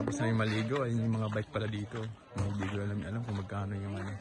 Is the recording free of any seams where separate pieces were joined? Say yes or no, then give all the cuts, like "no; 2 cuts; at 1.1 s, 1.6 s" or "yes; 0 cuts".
yes; 0 cuts